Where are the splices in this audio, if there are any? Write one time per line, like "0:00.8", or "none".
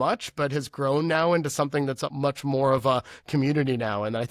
0:02.1